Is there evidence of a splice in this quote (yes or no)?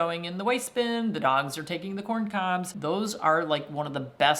yes